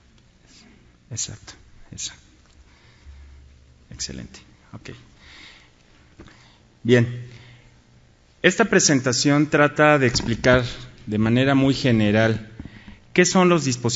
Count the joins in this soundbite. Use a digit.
0